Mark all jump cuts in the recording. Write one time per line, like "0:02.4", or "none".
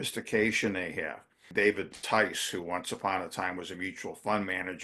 0:01.5